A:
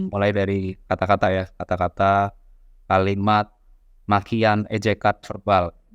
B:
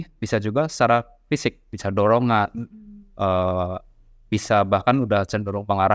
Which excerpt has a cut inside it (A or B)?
B